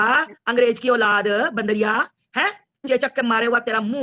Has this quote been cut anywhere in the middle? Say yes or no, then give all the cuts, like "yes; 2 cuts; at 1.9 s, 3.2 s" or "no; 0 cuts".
no; 0 cuts